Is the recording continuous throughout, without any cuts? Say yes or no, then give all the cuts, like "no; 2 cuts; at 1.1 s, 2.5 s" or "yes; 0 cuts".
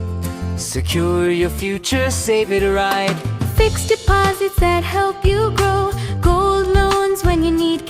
yes; 0 cuts